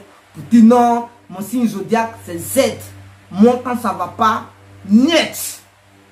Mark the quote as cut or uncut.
uncut